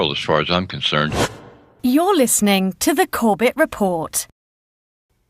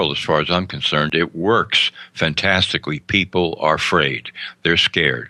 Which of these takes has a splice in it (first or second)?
first